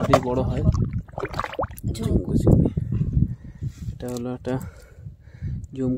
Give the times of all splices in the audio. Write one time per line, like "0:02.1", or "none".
none